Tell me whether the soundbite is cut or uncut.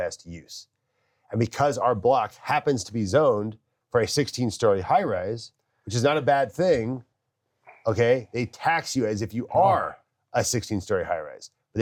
uncut